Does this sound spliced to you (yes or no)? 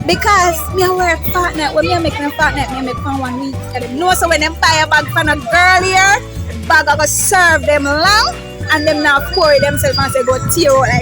yes